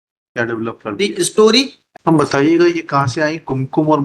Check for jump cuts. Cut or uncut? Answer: cut